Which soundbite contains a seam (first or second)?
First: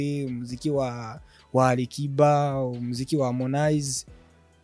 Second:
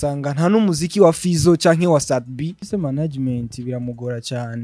second